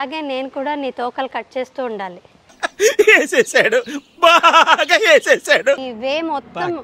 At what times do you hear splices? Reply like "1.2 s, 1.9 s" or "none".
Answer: 5.8 s